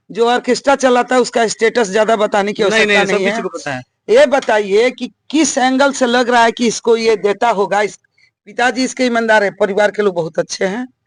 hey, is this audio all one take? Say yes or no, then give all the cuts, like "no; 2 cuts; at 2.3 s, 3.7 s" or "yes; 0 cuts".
yes; 0 cuts